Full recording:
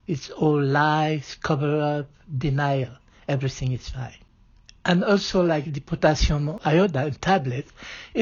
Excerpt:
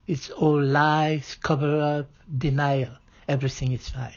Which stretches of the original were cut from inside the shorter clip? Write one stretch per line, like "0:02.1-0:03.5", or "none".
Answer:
none